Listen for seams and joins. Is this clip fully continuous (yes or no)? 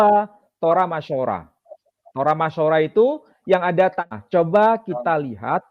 no